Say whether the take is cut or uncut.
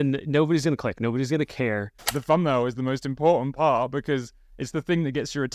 cut